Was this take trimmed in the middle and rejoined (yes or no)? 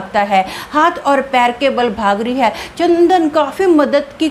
no